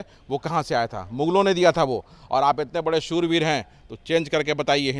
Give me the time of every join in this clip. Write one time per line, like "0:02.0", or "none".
none